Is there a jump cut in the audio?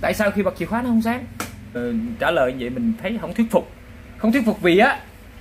yes; 1 cut; at 1.8 s

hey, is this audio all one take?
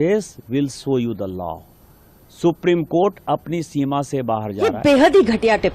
no; 1 cut; at 4.7 s

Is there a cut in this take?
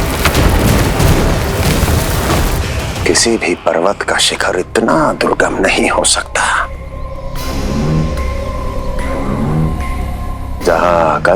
no; 0 cuts

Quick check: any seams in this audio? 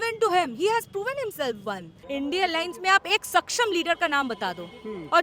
yes; 1 cut; at 1.9 s

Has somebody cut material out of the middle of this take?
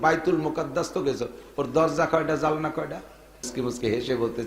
yes; 1 cut; at 3.5 s

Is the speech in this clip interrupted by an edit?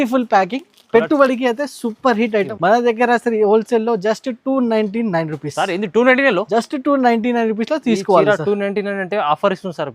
yes; 1 cut; at 2.5 s

